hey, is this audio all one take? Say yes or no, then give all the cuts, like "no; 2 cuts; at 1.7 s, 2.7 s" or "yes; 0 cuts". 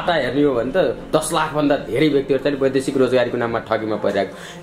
yes; 0 cuts